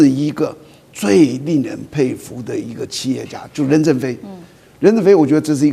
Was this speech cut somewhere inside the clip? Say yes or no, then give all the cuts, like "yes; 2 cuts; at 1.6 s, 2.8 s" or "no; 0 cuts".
no; 0 cuts